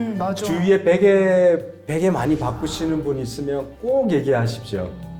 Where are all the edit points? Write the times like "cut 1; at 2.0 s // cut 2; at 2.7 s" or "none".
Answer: none